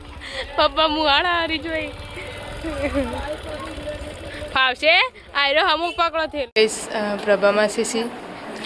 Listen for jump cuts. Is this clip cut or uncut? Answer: cut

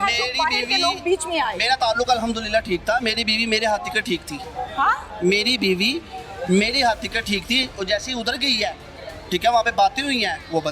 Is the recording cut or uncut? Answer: uncut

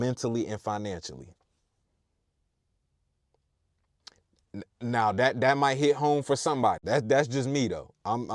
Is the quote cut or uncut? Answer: uncut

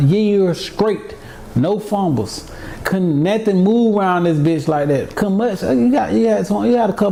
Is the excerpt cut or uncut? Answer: uncut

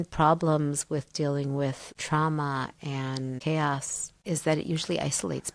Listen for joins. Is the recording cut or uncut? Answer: uncut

